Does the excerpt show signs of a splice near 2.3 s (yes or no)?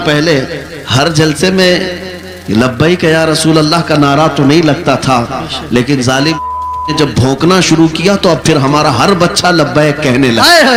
no